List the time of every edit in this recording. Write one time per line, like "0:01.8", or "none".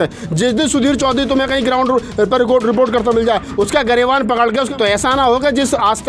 0:04.7